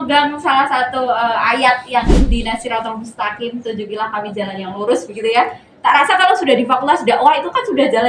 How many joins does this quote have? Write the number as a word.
zero